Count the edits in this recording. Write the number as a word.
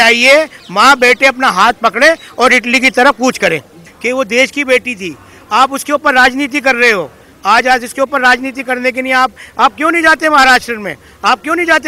one